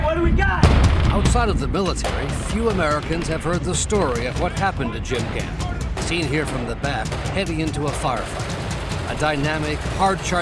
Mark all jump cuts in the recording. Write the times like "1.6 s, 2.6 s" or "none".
5.0 s